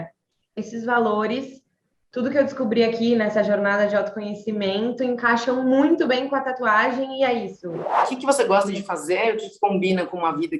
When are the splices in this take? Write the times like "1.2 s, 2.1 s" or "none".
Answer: 7.9 s